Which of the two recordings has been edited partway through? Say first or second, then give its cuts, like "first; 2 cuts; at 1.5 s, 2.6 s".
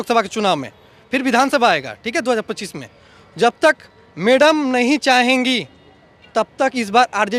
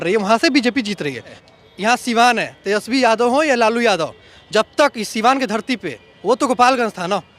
second; 1 cut; at 1.4 s